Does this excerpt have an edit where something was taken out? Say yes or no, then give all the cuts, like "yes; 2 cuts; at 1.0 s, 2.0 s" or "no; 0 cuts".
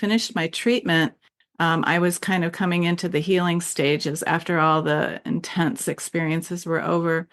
no; 0 cuts